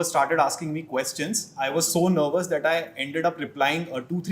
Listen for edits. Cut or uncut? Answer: uncut